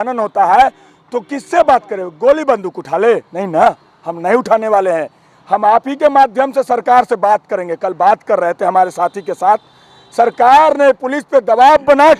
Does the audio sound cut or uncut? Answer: uncut